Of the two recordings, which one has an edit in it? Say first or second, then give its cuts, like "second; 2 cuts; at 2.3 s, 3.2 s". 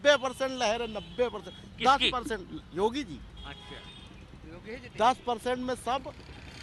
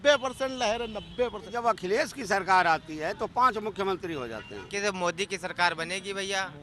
second; 2 cuts; at 1.5 s, 4.7 s